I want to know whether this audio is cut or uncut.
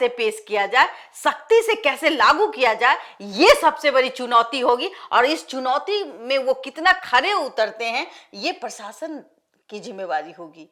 uncut